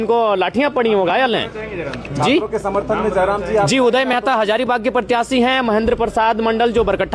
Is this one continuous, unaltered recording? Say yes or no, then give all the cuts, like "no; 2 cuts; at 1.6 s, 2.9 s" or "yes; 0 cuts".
yes; 0 cuts